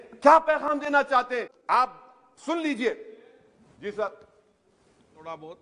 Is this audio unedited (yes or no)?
no